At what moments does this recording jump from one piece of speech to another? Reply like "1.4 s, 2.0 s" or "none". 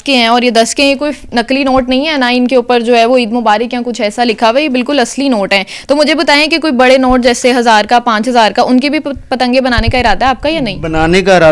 none